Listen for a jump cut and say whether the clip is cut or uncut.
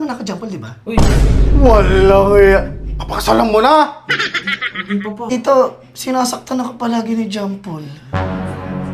cut